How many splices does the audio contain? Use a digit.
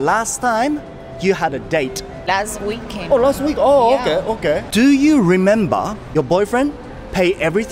1